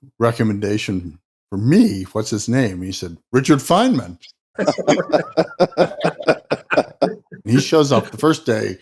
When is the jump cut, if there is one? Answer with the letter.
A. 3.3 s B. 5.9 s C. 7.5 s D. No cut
C